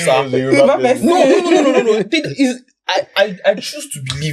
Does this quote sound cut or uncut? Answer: uncut